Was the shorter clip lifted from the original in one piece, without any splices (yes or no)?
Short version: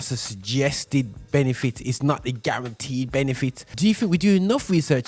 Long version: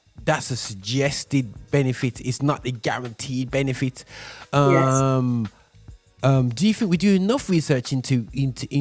no